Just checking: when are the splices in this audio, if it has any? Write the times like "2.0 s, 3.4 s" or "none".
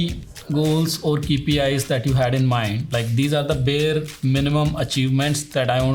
none